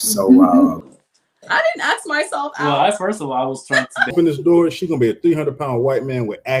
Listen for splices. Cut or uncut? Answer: cut